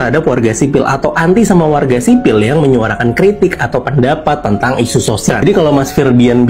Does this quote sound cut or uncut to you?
cut